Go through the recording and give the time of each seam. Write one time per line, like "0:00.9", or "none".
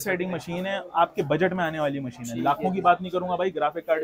none